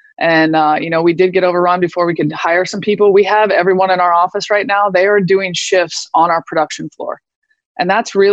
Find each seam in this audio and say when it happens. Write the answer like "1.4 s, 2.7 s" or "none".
none